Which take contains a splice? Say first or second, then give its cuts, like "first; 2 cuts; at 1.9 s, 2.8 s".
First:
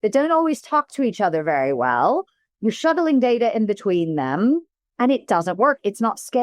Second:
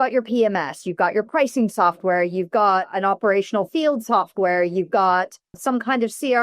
second; 2 cuts; at 2.9 s, 5.5 s